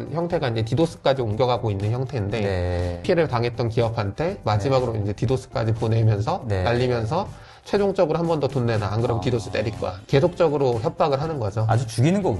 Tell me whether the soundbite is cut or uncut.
uncut